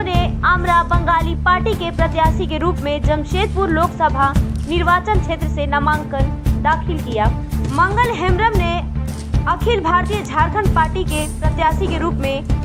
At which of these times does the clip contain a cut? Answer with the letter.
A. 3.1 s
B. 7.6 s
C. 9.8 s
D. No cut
D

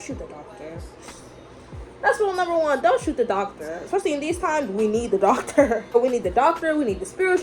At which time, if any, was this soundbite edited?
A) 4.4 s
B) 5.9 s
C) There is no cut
B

